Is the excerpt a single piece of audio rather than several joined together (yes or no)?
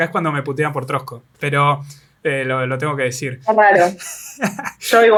yes